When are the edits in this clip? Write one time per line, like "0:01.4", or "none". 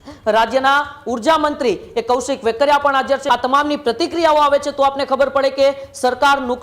0:03.2